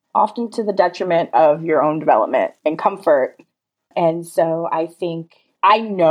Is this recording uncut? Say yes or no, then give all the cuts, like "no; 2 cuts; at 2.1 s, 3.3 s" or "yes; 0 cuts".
no; 1 cut; at 3.5 s